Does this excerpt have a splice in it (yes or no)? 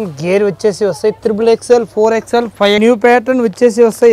yes